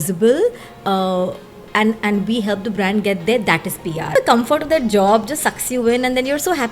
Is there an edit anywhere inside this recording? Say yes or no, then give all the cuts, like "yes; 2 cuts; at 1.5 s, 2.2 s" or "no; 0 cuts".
yes; 1 cut; at 4.1 s